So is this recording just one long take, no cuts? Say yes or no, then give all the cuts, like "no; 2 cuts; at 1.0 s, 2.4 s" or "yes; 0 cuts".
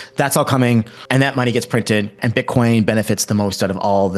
no; 2 cuts; at 1.0 s, 2.2 s